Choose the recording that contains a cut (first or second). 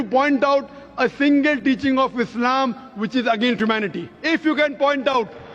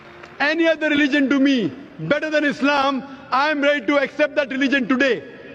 first